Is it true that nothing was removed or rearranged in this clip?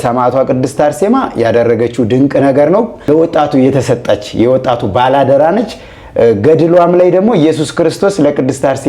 no; 1 cut; at 3.1 s

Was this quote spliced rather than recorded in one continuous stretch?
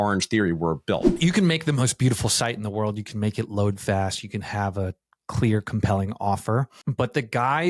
yes; 2 cuts; at 1.1 s, 6.8 s

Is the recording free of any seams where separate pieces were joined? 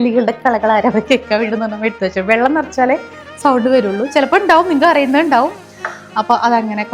yes; 0 cuts

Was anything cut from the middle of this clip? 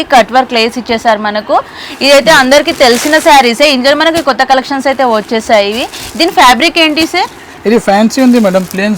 no; 0 cuts

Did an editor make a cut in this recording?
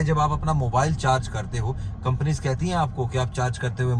no; 0 cuts

